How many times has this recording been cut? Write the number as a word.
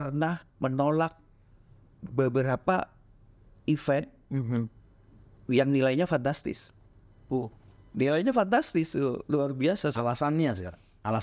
zero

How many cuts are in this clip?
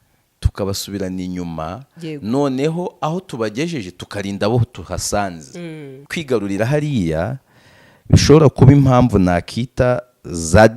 one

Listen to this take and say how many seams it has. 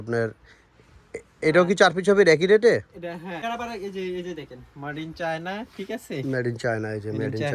one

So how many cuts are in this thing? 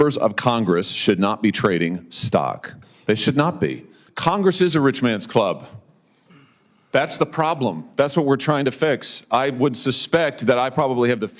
one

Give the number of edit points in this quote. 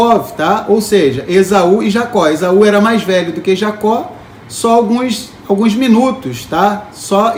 zero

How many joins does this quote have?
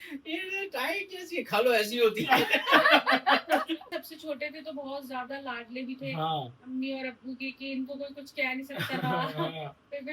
one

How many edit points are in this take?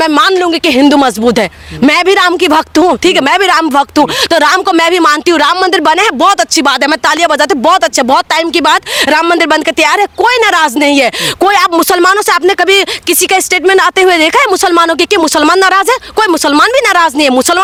zero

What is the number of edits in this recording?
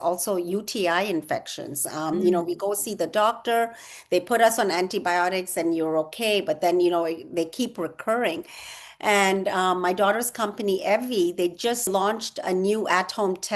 one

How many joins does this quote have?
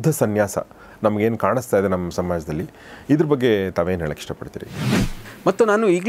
one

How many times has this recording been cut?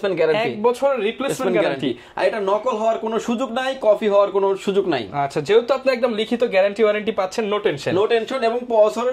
zero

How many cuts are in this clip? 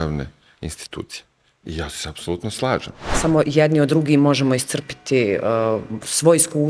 one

